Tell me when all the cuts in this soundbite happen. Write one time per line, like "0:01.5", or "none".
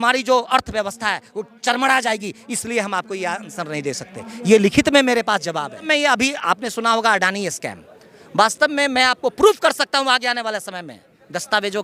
0:05.9